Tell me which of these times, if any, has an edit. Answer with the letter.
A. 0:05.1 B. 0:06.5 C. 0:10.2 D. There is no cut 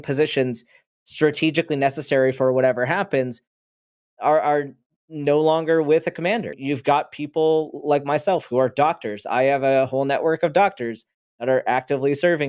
B